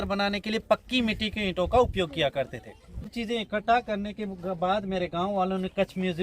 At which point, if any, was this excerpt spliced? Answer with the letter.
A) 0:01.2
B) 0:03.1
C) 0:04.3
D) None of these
B